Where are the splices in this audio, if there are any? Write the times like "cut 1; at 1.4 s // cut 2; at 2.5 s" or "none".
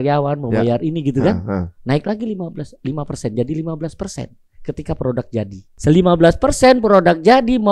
cut 1; at 5.6 s